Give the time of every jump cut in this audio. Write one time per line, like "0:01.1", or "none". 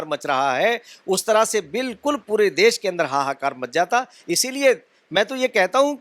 none